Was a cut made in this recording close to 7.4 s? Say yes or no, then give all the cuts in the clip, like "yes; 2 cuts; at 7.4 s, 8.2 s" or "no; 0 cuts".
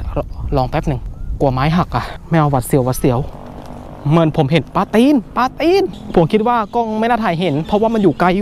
no; 4 cuts; at 1.1 s, 2.1 s, 3.3 s, 6.0 s